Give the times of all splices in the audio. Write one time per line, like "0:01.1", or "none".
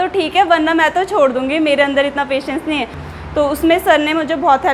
0:03.0